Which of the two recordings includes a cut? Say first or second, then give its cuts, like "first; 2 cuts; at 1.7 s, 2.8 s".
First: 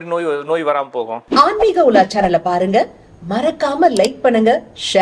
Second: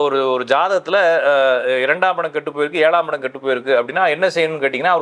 first; 1 cut; at 1.2 s